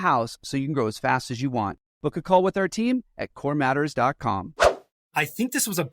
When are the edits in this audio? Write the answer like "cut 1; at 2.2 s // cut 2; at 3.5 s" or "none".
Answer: cut 1; at 4.9 s